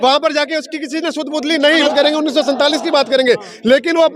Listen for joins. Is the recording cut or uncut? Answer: cut